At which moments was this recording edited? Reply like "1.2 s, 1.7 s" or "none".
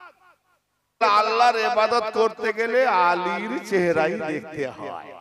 1.0 s